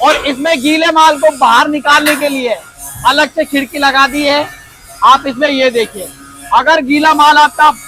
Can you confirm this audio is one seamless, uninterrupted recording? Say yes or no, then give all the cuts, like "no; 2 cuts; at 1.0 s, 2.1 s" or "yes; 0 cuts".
yes; 0 cuts